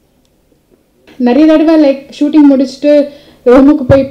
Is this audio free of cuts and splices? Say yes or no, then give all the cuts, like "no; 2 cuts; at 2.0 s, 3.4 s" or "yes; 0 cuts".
no; 1 cut; at 1.1 s